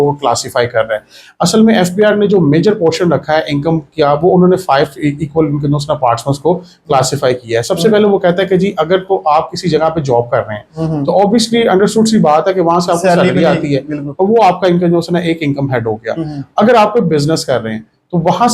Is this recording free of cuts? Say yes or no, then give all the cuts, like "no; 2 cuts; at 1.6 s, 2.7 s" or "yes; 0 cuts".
yes; 0 cuts